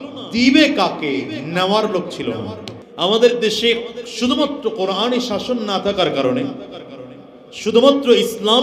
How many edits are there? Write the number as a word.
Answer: one